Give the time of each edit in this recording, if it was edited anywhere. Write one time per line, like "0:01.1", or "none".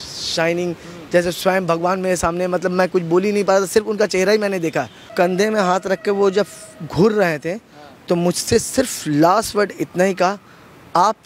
0:05.1